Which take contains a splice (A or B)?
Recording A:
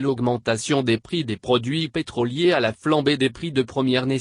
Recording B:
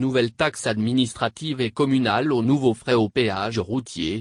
A